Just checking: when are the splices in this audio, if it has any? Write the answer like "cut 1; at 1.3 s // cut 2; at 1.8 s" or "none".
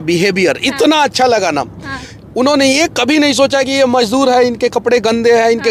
none